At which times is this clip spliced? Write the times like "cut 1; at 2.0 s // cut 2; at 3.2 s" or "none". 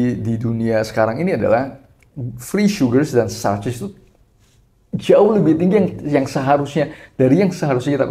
none